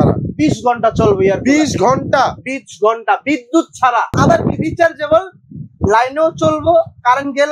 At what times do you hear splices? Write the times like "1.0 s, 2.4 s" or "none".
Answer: 4.2 s